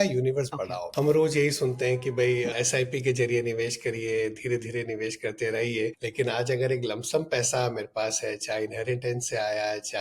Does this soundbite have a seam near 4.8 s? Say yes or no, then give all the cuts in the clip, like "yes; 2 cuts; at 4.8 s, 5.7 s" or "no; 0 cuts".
no; 1 cut; at 0.9 s